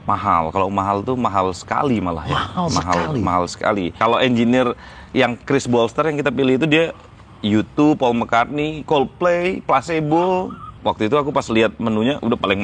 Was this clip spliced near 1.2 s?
no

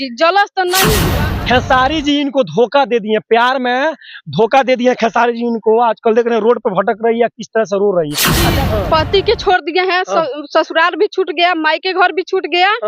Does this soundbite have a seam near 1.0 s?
yes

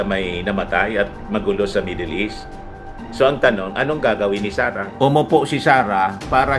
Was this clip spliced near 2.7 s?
no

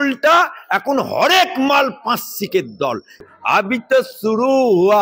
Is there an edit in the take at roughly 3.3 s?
yes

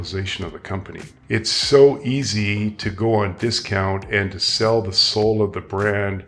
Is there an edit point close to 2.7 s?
no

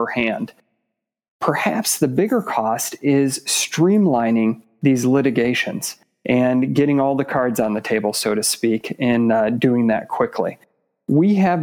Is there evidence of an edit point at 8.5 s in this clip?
no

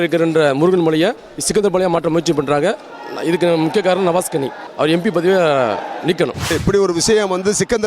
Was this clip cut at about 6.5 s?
yes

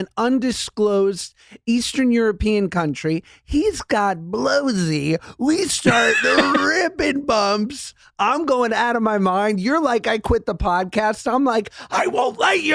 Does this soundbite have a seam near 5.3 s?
no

